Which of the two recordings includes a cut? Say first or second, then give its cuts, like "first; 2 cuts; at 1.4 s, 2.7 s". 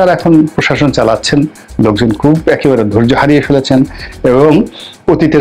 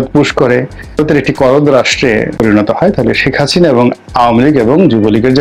second; 2 cuts; at 1.0 s, 2.3 s